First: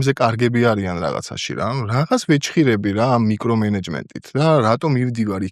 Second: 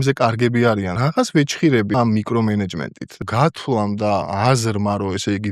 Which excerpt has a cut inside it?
second; 4 cuts; at 0.9 s, 1.9 s, 3.2 s, 4.3 s

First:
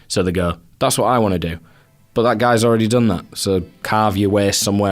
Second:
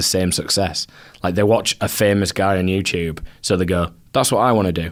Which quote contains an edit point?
first; 1 cut; at 3.8 s

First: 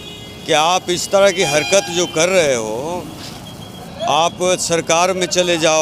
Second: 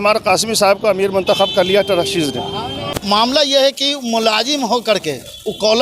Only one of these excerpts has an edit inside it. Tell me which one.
second; 1 cut; at 2.8 s

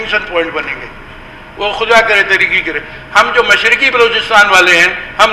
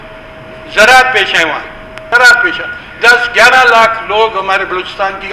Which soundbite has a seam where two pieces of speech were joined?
second; 1 cut; at 2.0 s

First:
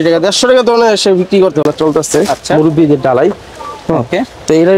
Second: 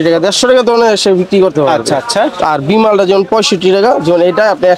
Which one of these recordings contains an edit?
first; 1 cut; at 1.6 s

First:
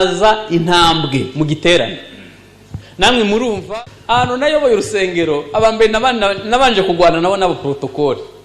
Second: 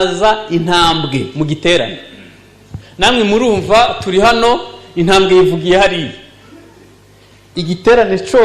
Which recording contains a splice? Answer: first; 1 cut; at 3.6 s

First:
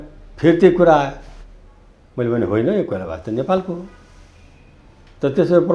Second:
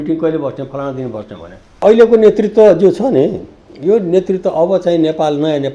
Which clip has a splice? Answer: second; 1 cut; at 1.8 s

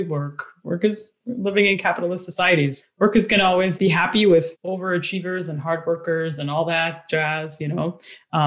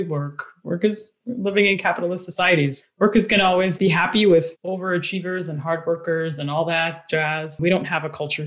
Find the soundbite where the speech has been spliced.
second; 1 cut; at 7.6 s

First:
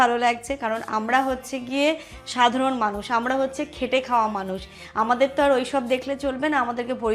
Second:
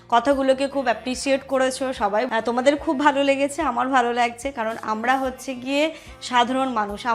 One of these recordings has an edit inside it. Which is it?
second; 1 cut; at 2.3 s

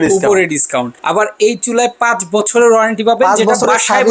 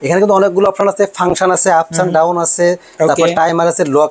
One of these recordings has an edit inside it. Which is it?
first; 1 cut; at 0.9 s

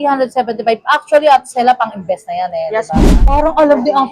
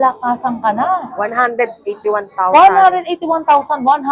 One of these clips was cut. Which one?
first; 1 cut; at 2.9 s

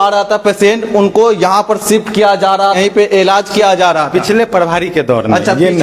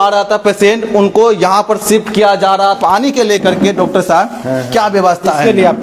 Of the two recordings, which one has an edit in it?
second; 1 cut; at 2.8 s

